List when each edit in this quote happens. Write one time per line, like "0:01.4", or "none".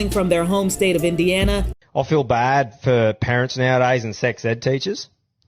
0:01.7